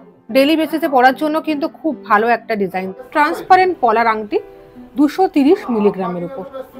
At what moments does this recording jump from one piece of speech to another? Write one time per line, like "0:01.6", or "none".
0:03.0